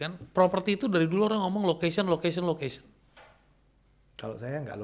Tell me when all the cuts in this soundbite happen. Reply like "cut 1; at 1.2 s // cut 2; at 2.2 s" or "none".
none